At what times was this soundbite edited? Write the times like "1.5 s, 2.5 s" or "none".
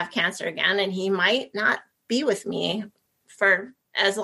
none